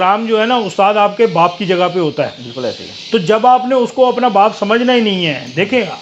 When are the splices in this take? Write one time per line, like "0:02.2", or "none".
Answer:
none

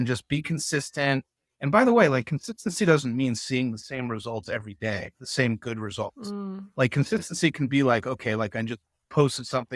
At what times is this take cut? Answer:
none

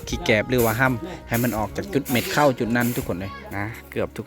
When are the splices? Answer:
0:03.4

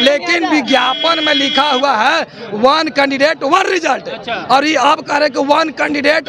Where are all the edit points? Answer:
none

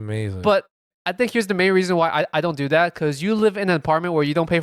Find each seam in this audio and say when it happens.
0:01.0

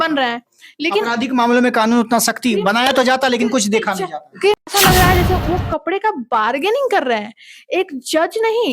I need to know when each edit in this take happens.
0:04.6

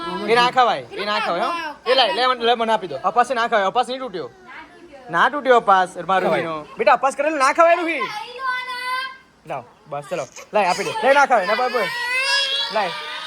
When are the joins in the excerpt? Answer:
0:02.9
0:06.3
0:11.0

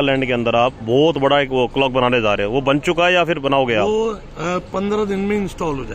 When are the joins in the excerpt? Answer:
none

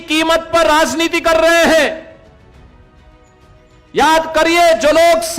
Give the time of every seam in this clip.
0:02.2
0:03.9

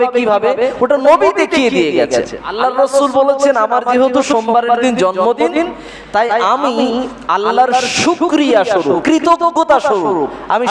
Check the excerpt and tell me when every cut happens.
0:02.4
0:09.0

